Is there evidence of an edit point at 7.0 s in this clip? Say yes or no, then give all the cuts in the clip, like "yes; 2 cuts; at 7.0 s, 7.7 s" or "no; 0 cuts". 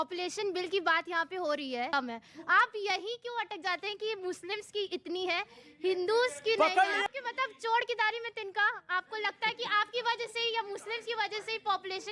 yes; 2 cuts; at 1.9 s, 7.0 s